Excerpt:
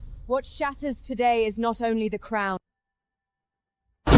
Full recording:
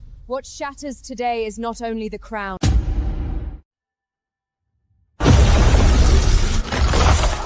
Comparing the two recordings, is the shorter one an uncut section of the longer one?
no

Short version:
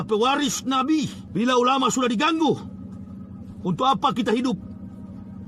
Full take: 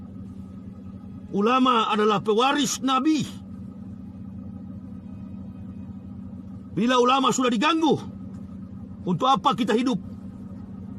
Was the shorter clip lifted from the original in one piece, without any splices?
no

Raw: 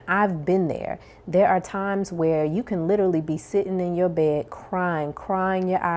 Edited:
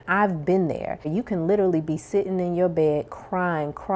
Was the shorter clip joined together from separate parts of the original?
yes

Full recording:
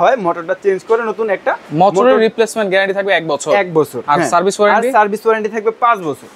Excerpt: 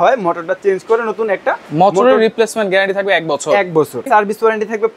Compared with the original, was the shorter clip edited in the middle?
yes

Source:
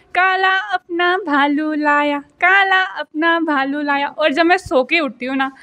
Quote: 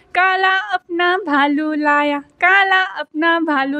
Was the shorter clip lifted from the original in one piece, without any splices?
yes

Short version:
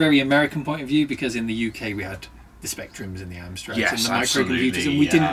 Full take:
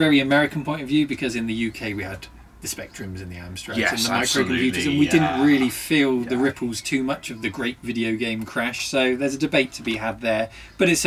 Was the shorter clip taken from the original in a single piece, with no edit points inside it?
yes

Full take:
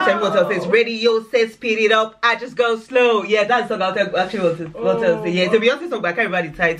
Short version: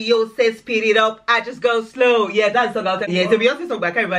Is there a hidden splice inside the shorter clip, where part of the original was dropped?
yes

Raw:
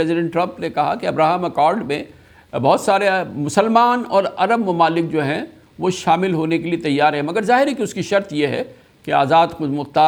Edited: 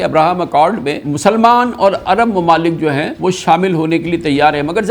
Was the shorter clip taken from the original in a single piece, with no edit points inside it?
no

